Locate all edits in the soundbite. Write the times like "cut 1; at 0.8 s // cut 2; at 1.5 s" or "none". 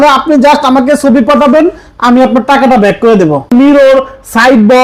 cut 1; at 3.5 s